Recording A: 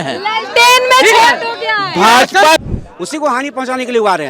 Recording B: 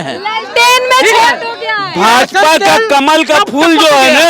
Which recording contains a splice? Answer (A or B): A